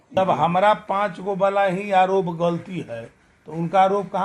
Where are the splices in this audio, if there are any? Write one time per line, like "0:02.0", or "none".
none